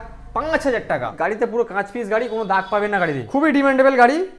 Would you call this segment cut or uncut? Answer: cut